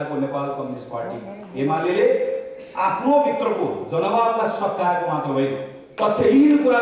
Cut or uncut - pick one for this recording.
cut